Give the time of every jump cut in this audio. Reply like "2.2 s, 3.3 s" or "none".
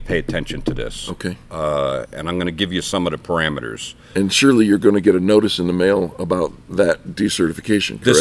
4.0 s